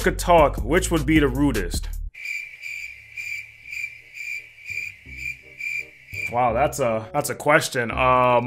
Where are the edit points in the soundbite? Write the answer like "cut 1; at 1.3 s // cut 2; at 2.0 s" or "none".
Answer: none